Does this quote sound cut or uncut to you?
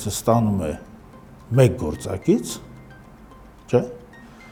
uncut